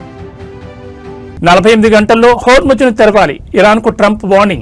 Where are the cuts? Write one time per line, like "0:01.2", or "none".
0:01.3

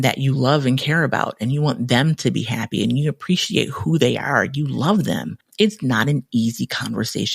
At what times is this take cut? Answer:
0:05.4

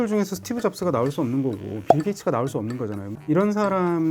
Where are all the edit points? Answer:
0:03.1

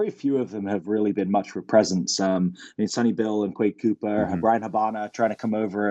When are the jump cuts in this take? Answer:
none

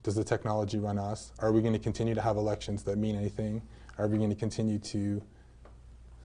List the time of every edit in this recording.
0:01.2

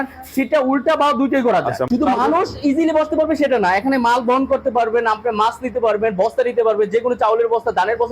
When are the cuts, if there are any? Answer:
0:01.8

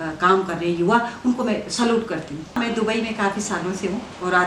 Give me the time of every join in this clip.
0:02.6

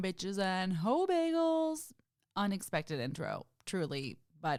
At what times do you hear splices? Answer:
none

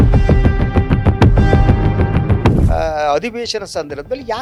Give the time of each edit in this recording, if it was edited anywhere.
none

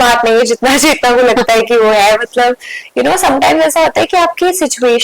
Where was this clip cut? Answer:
none

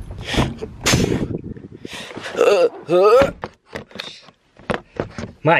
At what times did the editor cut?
0:03.4

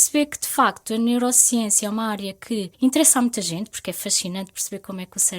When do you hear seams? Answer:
0:02.7

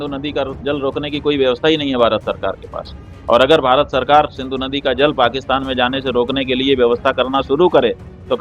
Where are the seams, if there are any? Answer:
none

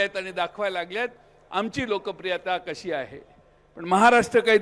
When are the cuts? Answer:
none

